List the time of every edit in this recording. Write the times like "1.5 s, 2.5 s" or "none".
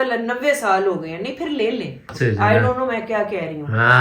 2.1 s

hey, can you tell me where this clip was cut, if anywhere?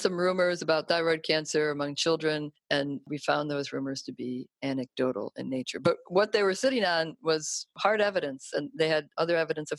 2.5 s, 7.7 s

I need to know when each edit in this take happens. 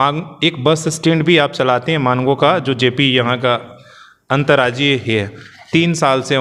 none

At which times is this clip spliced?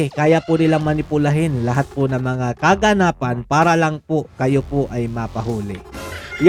none

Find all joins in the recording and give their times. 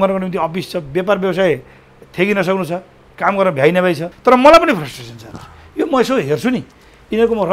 4.1 s

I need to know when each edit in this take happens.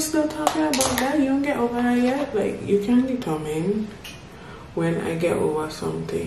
none

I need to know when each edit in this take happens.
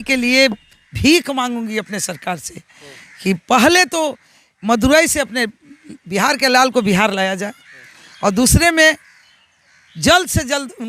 none

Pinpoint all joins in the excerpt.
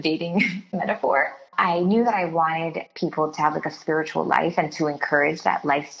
1.5 s, 2.8 s

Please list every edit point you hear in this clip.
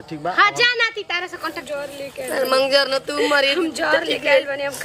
1.6 s

